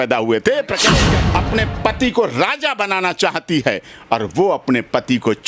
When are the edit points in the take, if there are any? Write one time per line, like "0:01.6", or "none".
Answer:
0:01.1